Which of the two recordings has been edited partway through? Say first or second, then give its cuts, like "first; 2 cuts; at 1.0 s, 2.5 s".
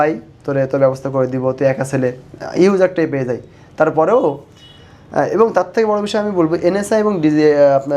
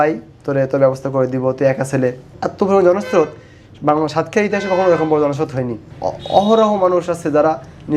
second; 2 cuts; at 2.4 s, 5.8 s